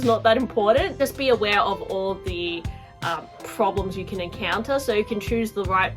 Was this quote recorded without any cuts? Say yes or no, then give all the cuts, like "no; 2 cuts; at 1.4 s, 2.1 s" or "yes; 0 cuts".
yes; 0 cuts